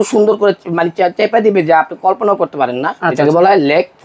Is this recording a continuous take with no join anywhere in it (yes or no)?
no